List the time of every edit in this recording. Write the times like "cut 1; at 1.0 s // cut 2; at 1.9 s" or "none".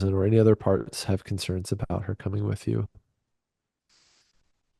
none